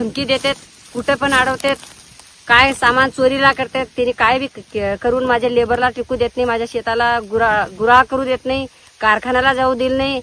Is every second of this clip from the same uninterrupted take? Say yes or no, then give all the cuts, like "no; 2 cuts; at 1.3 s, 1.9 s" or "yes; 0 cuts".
yes; 0 cuts